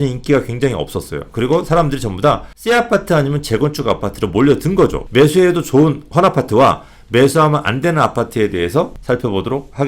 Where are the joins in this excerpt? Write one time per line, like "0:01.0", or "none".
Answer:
0:02.5
0:05.0
0:09.0